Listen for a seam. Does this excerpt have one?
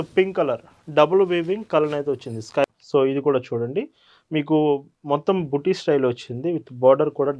yes; 1 cut; at 2.6 s

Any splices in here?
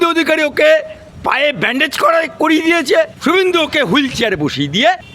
yes; 2 cuts; at 1.0 s, 3.1 s

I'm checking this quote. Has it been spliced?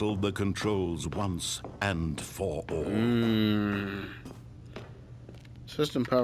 no; 0 cuts

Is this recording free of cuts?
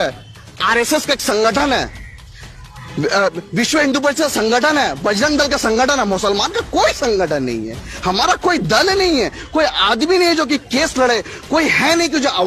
yes; 0 cuts

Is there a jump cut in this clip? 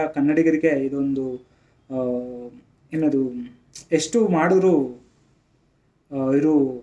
no; 0 cuts

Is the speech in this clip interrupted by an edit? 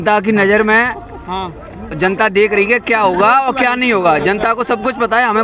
no; 0 cuts

